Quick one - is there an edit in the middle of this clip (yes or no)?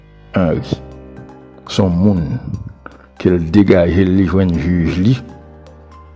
yes